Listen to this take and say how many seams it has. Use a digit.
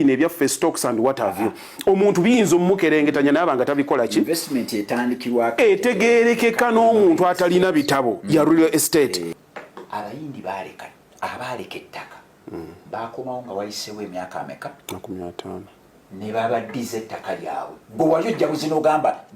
1